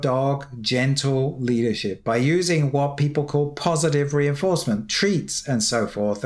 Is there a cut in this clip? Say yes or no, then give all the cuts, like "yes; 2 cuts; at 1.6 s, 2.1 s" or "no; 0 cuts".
no; 0 cuts